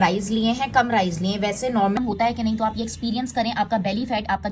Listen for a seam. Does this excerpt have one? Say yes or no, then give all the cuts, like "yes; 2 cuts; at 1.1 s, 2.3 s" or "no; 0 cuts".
yes; 1 cut; at 2.0 s